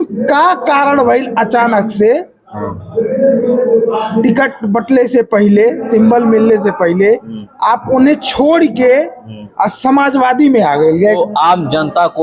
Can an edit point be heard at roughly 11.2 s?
yes; 1 cut; at 11.2 s

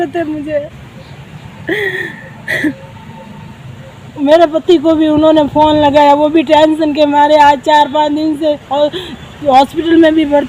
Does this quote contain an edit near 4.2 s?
yes; 1 cut; at 4.2 s

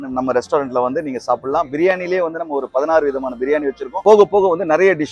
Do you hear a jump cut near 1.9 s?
no; 1 cut; at 4.0 s

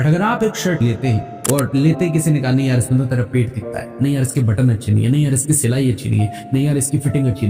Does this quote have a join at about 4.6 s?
no; 1 cut; at 0.9 s

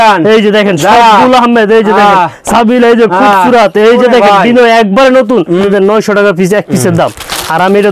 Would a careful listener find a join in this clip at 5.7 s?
yes; 1 cut; at 5.7 s

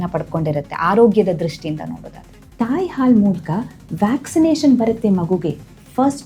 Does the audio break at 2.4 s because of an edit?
yes; 1 cut; at 2.4 s

